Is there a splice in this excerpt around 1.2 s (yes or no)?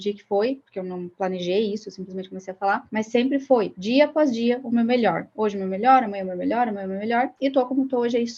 no